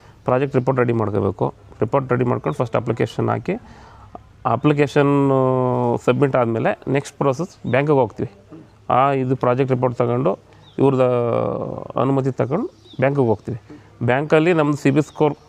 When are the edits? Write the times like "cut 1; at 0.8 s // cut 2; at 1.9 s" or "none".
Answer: none